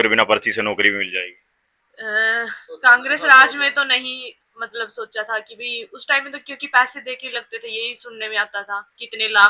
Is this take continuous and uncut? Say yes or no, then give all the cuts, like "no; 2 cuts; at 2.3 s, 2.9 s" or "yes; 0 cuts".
yes; 0 cuts